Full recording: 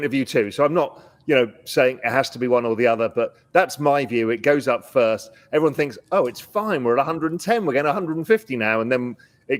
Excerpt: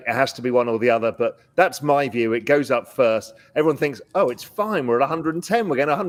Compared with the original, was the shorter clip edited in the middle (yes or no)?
no